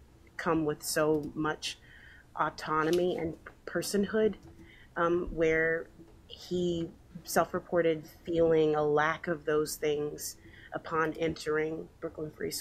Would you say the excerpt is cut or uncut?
uncut